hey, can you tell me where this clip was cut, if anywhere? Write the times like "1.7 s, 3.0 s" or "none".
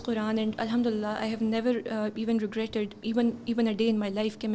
none